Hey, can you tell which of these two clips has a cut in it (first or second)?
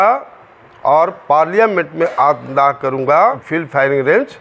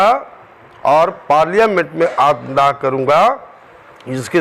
first